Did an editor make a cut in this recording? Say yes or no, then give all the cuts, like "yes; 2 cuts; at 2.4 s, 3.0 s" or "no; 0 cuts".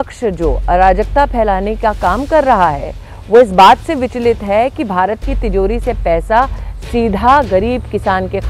no; 0 cuts